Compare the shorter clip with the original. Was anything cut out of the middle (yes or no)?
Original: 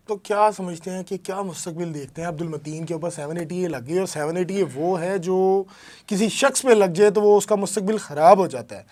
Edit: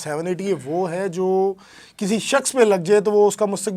no